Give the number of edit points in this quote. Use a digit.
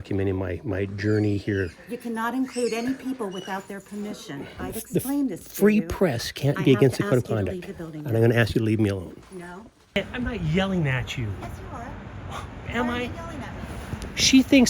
2